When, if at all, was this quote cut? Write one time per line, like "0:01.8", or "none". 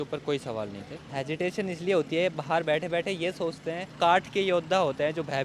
0:01.1
0:03.9